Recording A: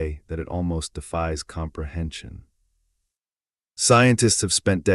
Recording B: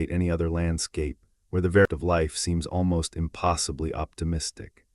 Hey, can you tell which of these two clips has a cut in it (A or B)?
B